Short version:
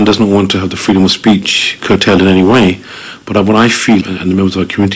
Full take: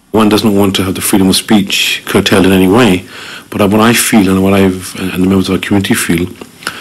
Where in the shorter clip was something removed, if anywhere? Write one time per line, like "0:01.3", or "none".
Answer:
0:04.0

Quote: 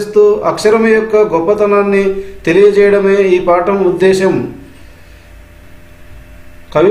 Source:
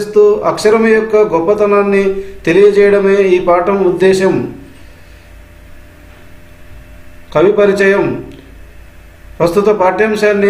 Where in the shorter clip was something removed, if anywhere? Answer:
0:05.6

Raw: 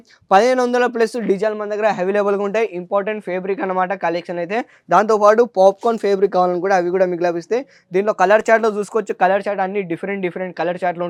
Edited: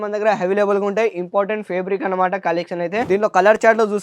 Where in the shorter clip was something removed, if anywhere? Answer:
0:03.1

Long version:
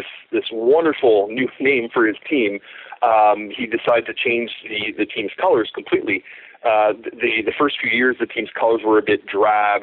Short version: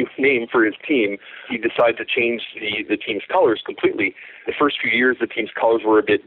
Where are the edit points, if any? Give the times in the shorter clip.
0:01.4
0:04.4

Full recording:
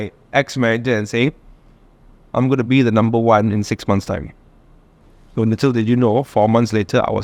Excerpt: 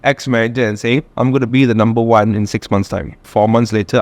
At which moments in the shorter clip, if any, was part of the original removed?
0:01.1
0:03.3

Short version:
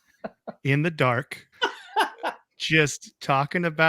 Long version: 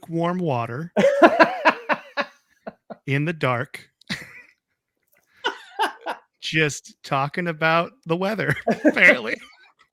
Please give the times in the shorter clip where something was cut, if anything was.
0:01.4

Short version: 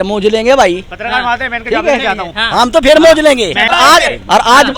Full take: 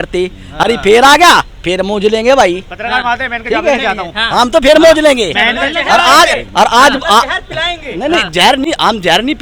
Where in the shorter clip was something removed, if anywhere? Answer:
0:03.7

